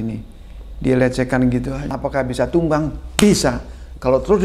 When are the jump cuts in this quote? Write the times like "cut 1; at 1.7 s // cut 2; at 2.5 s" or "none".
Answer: cut 1; at 2.0 s